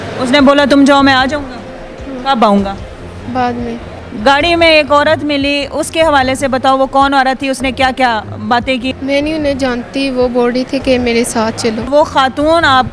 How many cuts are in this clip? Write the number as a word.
three